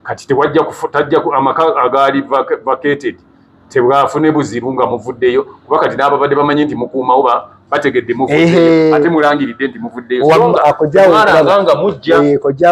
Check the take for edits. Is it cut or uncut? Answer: uncut